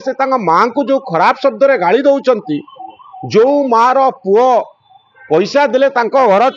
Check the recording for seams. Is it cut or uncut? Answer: uncut